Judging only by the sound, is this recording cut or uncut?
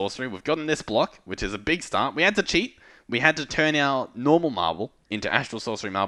uncut